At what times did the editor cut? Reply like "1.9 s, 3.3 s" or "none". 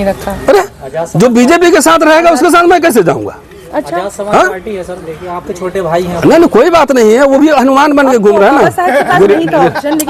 none